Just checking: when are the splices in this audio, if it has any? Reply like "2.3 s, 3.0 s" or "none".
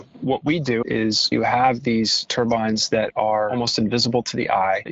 1.1 s, 2.2 s, 3.5 s